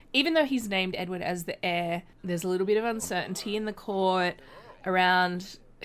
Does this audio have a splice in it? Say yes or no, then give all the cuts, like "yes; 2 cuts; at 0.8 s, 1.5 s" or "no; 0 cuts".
yes; 1 cut; at 2.1 s